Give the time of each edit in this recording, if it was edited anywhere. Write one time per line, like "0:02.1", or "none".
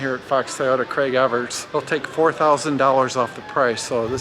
0:01.6

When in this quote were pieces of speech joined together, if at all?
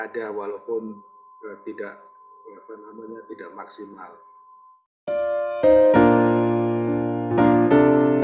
0:04.8

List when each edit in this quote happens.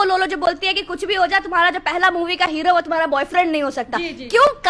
none

